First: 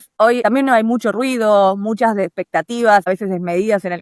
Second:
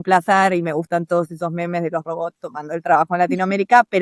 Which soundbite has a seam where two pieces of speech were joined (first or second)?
first